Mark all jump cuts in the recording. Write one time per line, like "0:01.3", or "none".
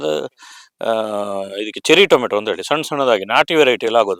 none